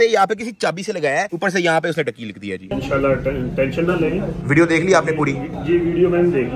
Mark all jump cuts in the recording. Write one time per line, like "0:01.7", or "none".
0:02.7